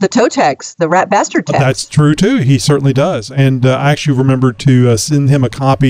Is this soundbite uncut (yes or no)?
yes